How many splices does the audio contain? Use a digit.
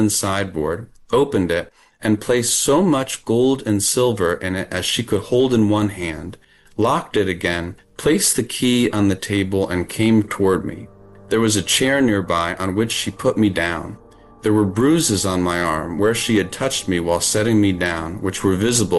0